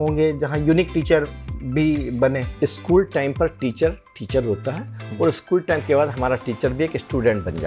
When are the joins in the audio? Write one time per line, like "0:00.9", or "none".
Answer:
0:02.5